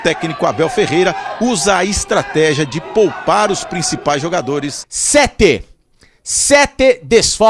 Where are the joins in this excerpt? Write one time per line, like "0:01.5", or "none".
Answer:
0:04.9